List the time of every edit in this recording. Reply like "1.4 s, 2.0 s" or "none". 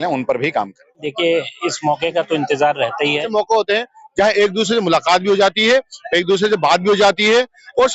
1.0 s, 3.3 s